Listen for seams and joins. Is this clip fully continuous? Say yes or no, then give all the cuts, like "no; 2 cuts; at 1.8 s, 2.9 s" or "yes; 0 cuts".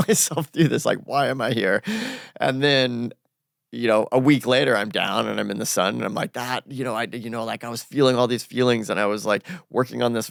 yes; 0 cuts